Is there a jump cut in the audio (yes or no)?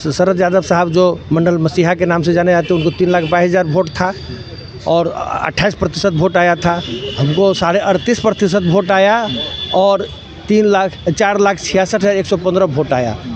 no